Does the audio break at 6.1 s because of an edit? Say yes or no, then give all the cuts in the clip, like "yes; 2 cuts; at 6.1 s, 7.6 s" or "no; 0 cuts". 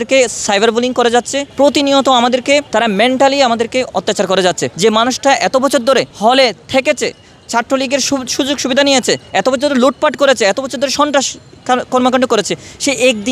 yes; 4 cuts; at 1.4 s, 2.7 s, 4.7 s, 6.1 s